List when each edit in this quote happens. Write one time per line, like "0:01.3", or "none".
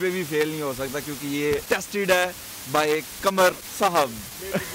none